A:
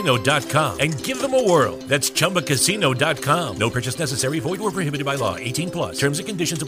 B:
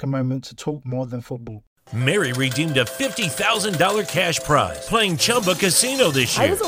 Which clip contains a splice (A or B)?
B